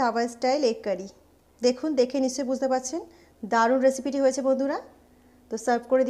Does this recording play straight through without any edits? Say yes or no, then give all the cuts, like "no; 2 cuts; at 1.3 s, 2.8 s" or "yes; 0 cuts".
yes; 0 cuts